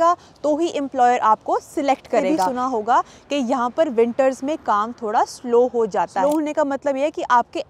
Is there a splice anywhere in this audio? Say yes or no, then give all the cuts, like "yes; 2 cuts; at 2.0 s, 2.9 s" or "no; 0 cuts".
yes; 2 cuts; at 2.5 s, 6.2 s